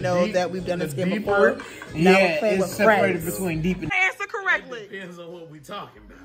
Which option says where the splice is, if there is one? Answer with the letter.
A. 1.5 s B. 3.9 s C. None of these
B